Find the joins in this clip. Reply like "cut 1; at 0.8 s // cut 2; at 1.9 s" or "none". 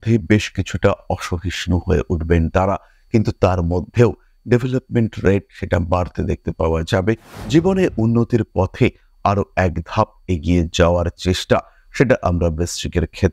none